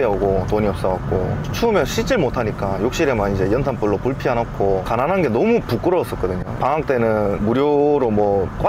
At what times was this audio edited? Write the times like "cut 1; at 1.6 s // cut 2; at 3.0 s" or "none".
none